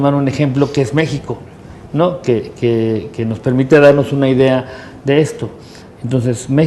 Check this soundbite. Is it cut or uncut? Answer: uncut